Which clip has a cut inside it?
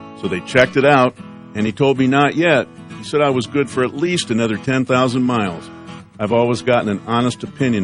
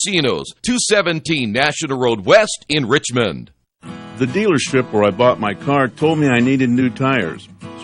second; 1 cut; at 3.8 s

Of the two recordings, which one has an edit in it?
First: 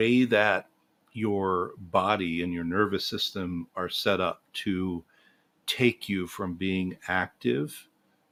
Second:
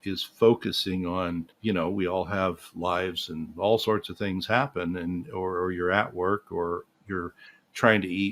second; 2 cuts; at 1.5 s, 6.8 s

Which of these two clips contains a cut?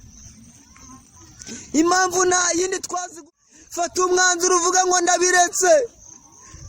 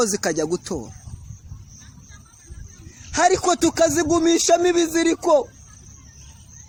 first; 1 cut; at 3.0 s

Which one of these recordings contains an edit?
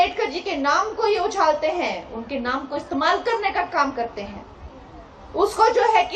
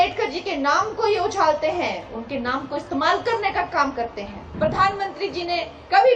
second; 1 cut; at 4.4 s

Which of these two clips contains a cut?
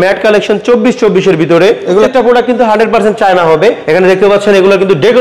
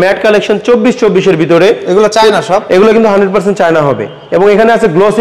first; 2 cuts; at 2.1 s, 3.8 s

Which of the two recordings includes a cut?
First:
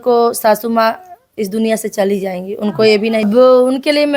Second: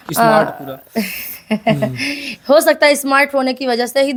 first; 1 cut; at 3.2 s

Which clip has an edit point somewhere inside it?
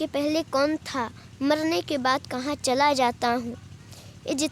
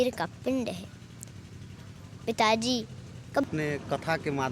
second; 1 cut; at 3.4 s

